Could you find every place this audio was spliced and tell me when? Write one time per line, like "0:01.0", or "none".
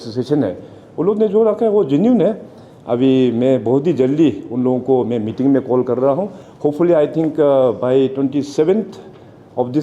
0:06.4